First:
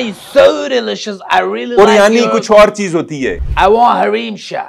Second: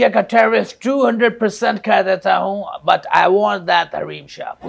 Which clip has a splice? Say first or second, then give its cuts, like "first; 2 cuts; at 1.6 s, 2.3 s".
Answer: first; 1 cut; at 3.4 s